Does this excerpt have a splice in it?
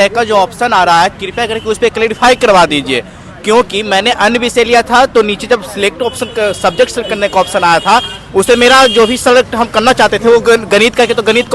no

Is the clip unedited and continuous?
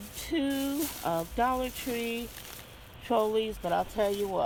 yes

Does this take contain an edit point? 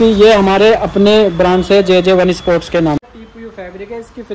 yes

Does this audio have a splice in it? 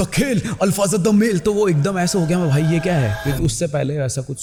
no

